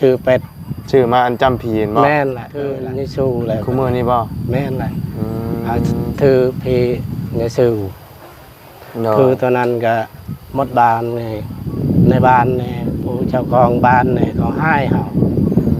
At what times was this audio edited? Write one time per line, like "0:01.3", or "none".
0:02.8